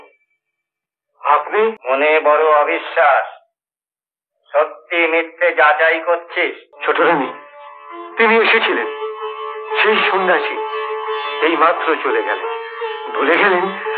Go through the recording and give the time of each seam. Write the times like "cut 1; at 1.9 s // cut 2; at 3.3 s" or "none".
cut 1; at 1.8 s // cut 2; at 6.7 s